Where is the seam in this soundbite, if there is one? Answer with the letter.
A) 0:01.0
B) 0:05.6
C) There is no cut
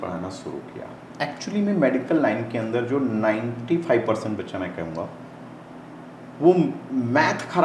A